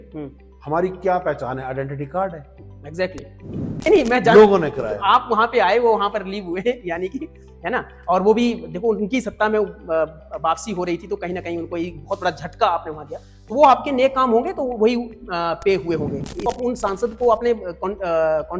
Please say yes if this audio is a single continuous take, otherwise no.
no